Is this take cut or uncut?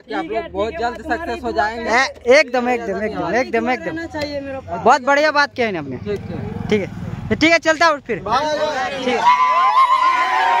uncut